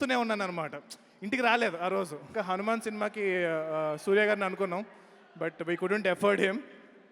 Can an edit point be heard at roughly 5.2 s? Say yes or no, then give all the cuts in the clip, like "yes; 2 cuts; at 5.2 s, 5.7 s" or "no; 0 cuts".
no; 1 cut; at 2.3 s